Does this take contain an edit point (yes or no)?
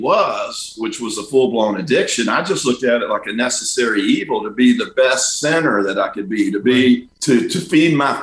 yes